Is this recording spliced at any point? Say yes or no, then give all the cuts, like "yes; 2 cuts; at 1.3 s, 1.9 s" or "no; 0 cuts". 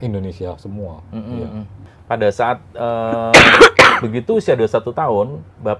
yes; 1 cut; at 1.8 s